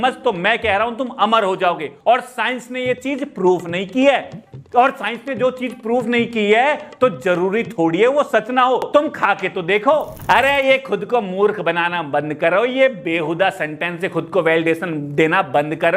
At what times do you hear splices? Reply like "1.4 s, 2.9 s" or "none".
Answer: none